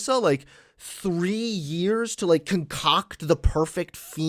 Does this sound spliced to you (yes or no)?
no